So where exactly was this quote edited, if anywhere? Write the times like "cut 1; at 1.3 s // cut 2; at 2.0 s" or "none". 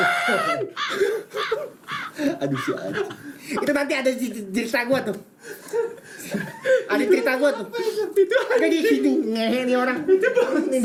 none

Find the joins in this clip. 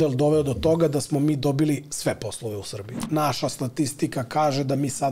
cut 1; at 3.0 s

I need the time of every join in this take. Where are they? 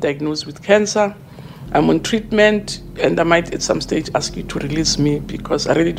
none

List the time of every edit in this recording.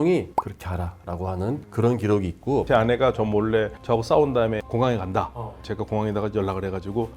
cut 1; at 2.7 s // cut 2; at 4.6 s // cut 3; at 5.7 s

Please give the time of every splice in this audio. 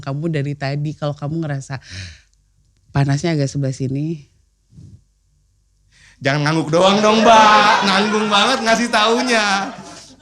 none

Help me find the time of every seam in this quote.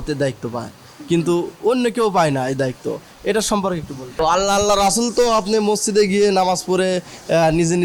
cut 1; at 4.2 s

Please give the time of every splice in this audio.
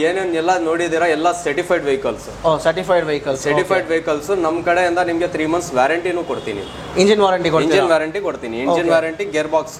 none

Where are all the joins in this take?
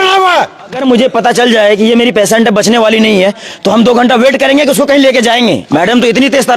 cut 1; at 0.8 s // cut 2; at 5.6 s

